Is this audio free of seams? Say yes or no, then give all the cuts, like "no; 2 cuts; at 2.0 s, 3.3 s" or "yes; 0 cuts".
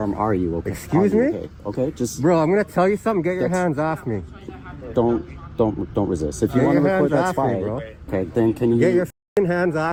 yes; 0 cuts